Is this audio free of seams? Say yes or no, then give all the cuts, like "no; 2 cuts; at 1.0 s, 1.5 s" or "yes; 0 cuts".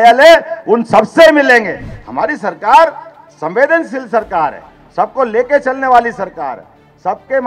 yes; 0 cuts